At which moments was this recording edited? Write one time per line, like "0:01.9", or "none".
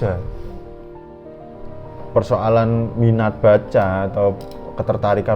0:01.2